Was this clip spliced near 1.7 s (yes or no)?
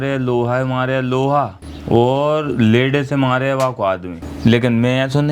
yes